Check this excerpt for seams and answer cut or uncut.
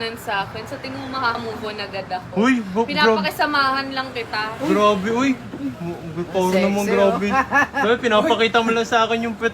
cut